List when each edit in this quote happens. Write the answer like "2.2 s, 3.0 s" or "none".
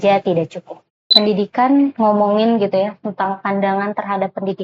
1.1 s